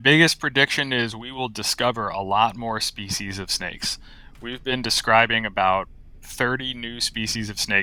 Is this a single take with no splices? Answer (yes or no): yes